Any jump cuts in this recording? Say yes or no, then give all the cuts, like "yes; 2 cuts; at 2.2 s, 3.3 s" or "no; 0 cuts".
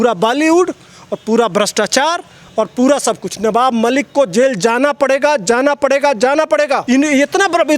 yes; 1 cut; at 6.8 s